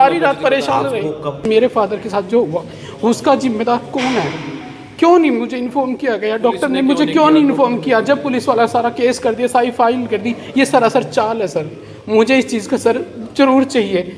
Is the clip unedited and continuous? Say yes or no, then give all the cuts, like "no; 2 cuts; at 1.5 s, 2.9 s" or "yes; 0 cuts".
no; 1 cut; at 1.4 s